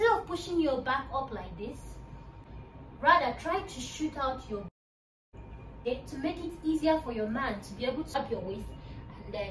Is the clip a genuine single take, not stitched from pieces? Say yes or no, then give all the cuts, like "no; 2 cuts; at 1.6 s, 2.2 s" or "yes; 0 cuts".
no; 3 cuts; at 2.5 s, 5.9 s, 8.1 s